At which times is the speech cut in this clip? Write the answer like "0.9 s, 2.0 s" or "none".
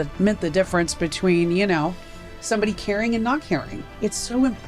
3.8 s